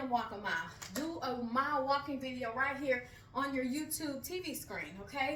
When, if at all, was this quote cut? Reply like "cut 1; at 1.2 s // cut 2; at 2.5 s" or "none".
none